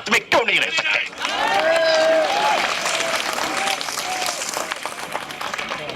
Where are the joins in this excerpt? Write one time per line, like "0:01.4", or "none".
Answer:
none